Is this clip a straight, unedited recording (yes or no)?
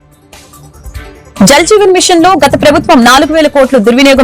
no